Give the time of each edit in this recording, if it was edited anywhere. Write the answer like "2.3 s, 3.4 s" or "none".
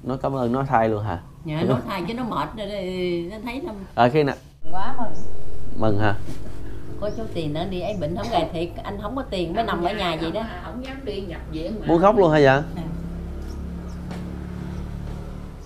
4.5 s